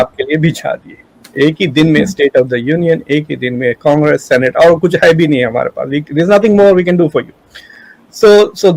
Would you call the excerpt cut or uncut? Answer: uncut